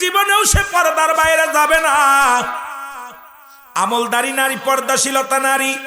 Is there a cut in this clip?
no; 0 cuts

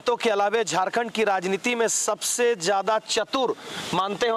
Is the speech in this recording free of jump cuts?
yes; 0 cuts

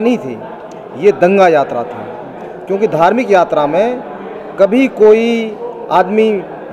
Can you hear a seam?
no; 0 cuts

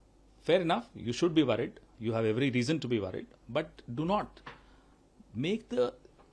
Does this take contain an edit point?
no; 0 cuts

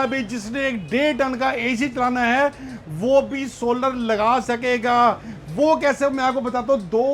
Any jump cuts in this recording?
no; 0 cuts

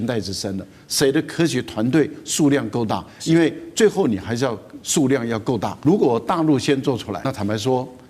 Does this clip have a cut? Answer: yes; 2 cuts; at 5.7 s, 7.3 s

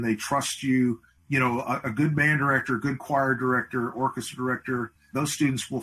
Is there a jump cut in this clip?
yes; 2 cuts; at 1.1 s, 5.1 s

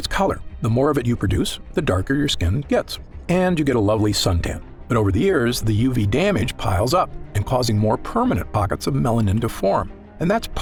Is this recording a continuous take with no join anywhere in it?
yes; 0 cuts

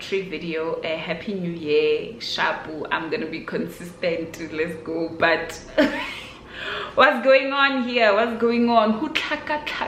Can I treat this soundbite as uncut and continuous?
yes; 0 cuts

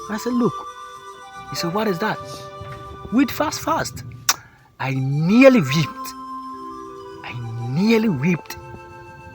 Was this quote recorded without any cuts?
no; 2 cuts; at 6.1 s, 7.6 s

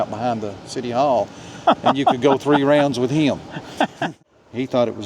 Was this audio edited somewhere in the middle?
yes; 1 cut; at 4.0 s

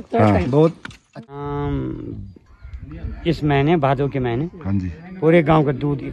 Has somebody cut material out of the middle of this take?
yes; 1 cut; at 1.3 s

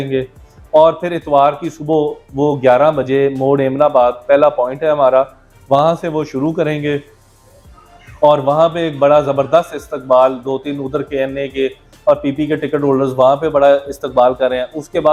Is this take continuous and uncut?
yes; 0 cuts

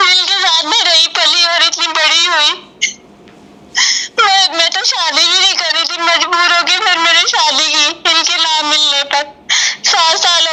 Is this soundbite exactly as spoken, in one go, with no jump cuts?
yes; 0 cuts

